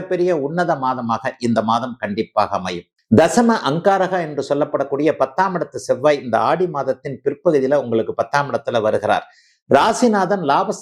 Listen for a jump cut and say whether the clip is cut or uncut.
uncut